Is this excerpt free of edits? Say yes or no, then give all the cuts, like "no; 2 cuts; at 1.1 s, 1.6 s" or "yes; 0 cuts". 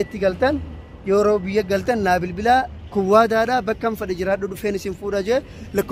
no; 1 cut; at 2.8 s